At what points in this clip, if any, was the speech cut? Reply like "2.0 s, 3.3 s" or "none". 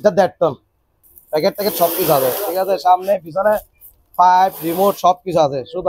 1.0 s